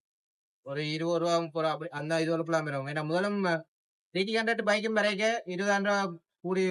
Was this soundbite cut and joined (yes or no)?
no